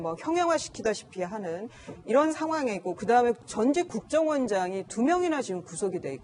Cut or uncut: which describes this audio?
cut